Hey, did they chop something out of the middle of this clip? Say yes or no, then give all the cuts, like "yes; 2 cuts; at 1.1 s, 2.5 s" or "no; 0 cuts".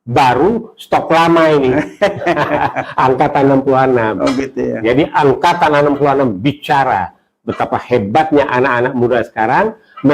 no; 0 cuts